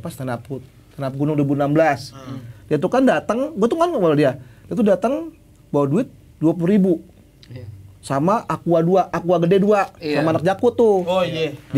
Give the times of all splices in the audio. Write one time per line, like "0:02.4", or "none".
none